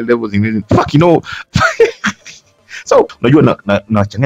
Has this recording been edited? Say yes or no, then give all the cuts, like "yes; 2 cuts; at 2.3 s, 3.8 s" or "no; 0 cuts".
yes; 1 cut; at 3.1 s